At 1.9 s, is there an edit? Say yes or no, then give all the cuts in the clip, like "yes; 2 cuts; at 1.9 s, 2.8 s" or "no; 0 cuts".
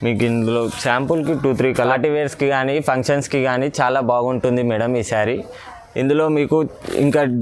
yes; 1 cut; at 1.9 s